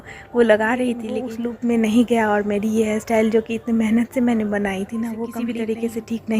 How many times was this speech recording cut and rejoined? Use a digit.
2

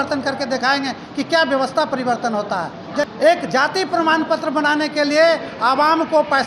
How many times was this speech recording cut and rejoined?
1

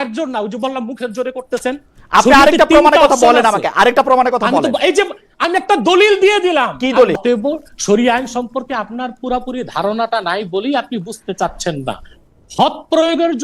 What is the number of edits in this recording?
1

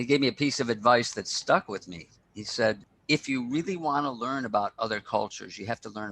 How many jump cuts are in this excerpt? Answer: 1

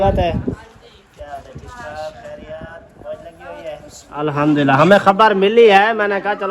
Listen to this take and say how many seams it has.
1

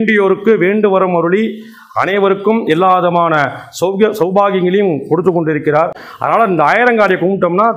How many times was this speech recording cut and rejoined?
1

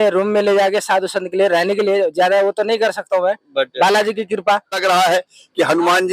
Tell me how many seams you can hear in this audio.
1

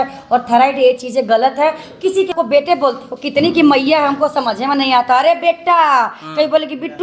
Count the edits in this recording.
1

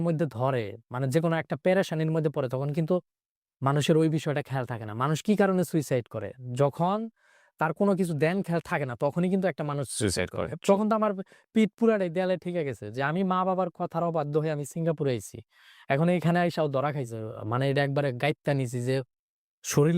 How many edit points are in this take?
1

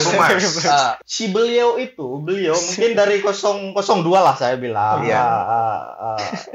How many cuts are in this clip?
1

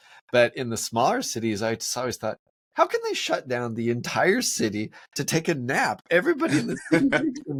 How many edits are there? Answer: 0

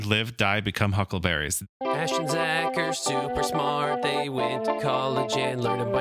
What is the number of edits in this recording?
1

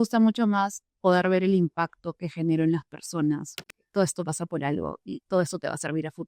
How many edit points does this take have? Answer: 1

